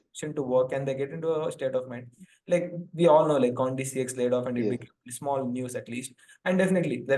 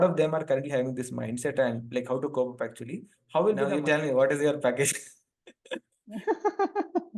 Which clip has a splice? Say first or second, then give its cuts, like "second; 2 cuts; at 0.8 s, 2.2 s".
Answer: second; 1 cut; at 3.7 s